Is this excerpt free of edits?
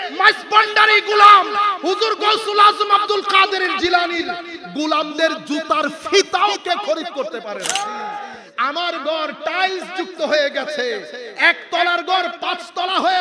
no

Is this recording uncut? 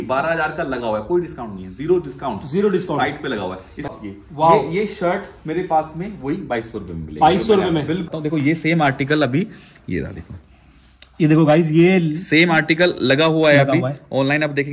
no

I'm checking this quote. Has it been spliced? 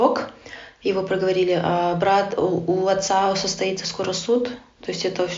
no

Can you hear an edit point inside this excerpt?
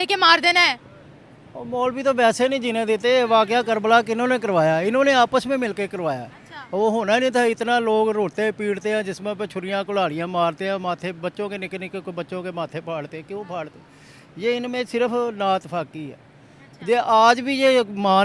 no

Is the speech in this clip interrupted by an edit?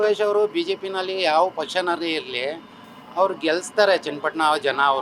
no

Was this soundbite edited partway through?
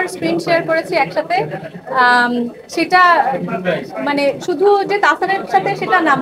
no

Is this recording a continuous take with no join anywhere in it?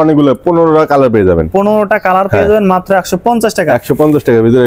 yes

